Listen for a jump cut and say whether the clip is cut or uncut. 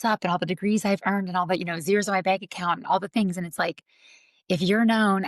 uncut